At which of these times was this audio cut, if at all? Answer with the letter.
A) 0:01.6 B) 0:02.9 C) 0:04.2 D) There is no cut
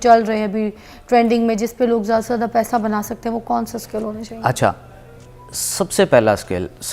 D